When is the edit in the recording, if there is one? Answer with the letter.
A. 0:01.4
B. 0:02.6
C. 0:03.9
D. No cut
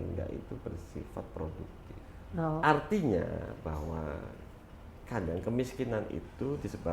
B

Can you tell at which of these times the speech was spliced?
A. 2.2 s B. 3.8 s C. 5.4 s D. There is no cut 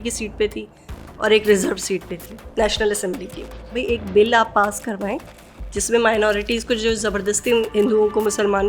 B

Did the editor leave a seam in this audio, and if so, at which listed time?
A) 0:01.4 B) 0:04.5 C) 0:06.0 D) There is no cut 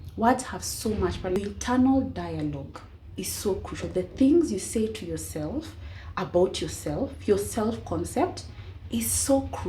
A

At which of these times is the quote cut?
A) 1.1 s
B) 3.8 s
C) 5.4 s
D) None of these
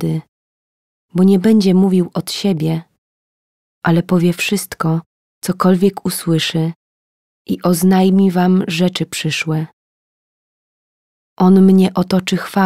D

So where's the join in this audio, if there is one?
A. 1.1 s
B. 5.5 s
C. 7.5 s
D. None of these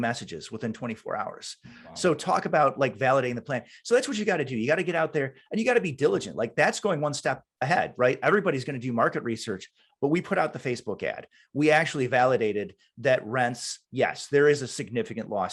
D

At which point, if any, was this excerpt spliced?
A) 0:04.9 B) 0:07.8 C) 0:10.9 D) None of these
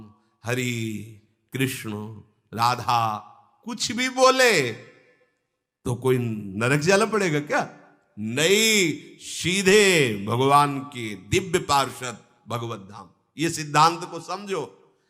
D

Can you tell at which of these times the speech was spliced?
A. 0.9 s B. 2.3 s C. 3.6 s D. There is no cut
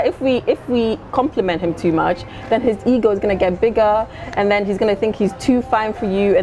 D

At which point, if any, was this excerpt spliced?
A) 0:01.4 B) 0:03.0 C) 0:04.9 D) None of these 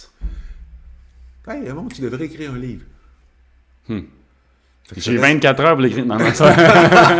D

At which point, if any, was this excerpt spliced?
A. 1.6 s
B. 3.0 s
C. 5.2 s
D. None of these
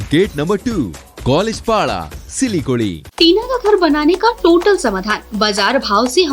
B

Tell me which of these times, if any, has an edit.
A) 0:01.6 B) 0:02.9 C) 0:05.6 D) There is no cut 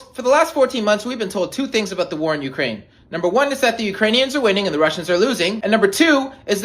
C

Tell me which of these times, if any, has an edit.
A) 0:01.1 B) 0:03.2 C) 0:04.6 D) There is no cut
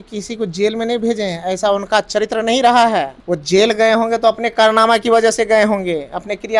B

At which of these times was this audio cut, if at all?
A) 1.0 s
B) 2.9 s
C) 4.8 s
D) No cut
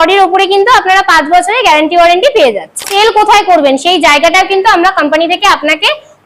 B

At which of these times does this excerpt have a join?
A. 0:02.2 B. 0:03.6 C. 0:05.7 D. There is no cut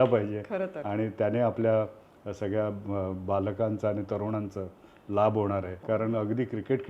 C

